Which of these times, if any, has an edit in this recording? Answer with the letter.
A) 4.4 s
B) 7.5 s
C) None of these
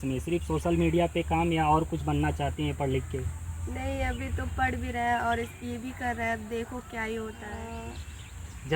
B